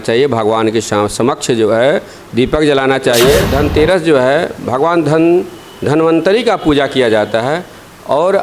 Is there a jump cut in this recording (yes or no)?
yes